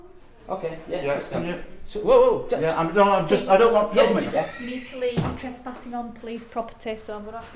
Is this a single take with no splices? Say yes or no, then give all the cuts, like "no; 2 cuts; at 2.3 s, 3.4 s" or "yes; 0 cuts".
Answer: no; 1 cut; at 4.3 s